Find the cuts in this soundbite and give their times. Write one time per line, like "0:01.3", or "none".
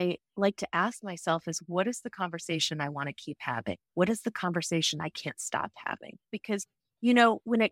0:06.4